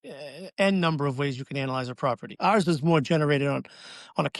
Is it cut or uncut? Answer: cut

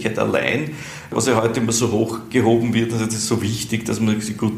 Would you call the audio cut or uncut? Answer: cut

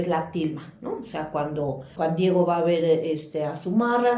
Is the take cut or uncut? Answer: uncut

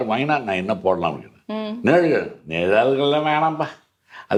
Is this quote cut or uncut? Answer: uncut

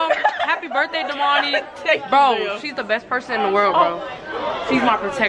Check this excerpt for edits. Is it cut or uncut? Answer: uncut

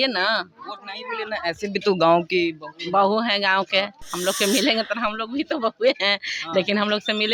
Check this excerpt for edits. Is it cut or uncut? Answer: uncut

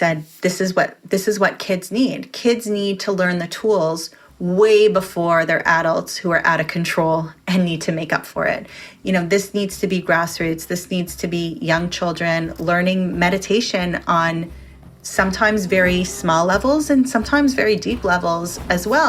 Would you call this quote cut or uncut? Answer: uncut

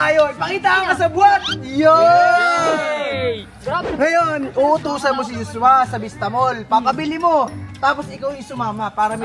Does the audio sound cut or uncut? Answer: uncut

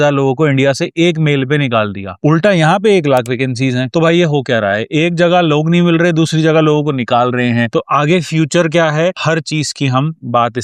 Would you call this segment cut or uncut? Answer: uncut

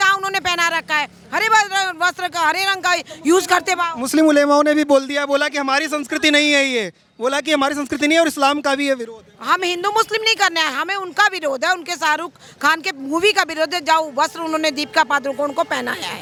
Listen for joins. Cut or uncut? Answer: uncut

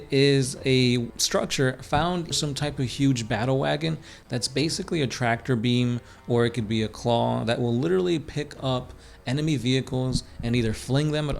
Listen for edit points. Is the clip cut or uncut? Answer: cut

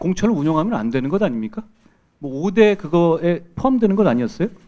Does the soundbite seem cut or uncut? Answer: uncut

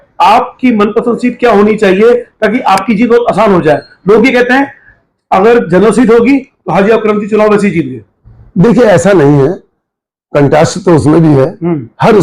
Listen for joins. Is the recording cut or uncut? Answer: uncut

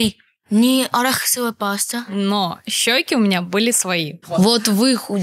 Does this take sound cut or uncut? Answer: cut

